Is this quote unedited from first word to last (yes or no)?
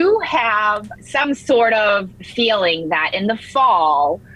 no